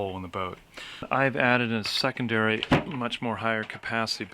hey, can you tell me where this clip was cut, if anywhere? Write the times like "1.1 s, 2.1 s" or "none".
1.1 s